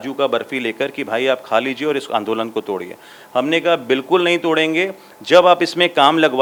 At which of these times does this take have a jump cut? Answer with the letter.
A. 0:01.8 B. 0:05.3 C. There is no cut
C